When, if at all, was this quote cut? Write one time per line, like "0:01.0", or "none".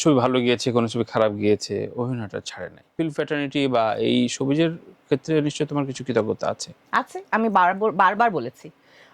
0:02.9